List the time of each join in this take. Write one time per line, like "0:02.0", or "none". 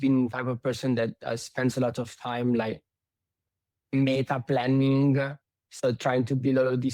none